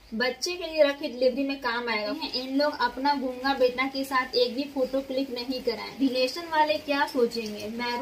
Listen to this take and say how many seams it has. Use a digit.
2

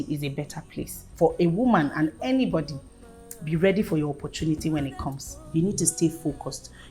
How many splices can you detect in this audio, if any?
2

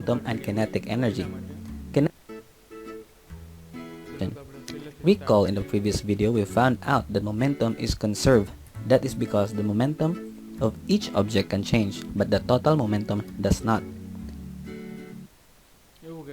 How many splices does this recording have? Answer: 0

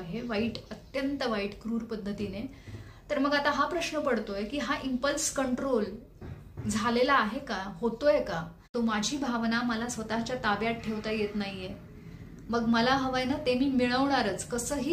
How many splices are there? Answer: 1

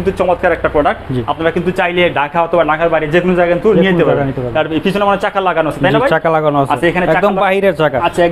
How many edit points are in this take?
0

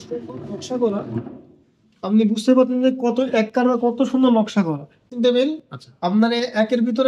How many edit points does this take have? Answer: 1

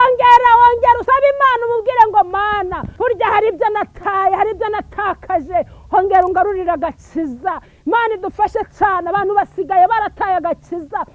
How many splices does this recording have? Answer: 2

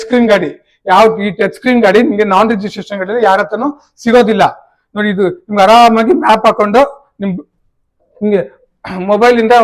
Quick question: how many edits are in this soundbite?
0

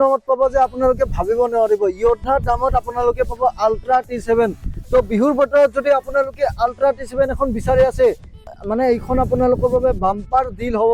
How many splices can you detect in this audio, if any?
1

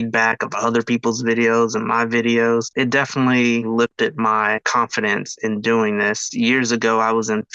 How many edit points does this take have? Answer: 3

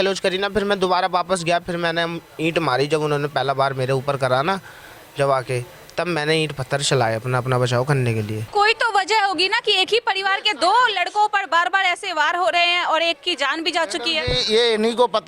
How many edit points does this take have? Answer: 1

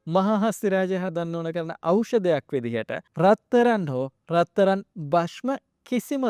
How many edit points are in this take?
1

